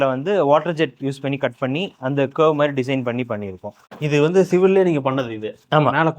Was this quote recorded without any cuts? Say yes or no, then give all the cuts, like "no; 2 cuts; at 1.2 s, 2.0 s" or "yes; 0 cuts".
no; 1 cut; at 3.7 s